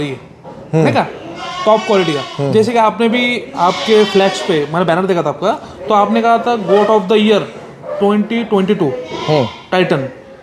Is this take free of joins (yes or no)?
yes